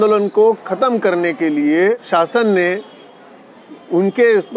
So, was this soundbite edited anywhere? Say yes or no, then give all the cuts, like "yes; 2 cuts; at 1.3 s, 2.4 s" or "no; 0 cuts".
yes; 1 cut; at 2.0 s